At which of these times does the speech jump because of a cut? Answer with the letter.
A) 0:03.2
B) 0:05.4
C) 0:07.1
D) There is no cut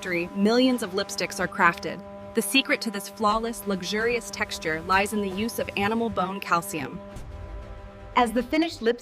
C